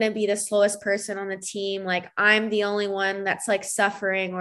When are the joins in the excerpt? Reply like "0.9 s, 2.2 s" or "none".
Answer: none